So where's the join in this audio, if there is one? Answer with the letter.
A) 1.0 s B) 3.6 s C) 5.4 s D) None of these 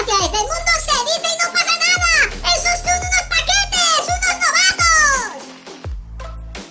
C